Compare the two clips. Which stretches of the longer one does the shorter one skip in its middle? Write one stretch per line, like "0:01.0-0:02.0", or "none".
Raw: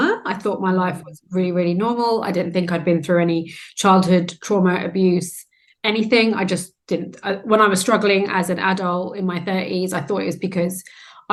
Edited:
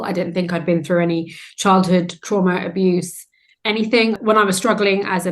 0:06.4-0:07.4

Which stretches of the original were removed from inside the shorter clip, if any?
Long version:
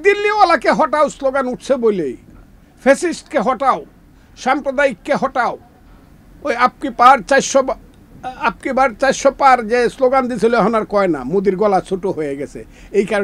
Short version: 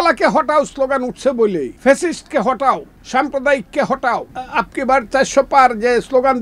0:02.2-0:02.7
0:03.9-0:04.3
0:05.7-0:08.2

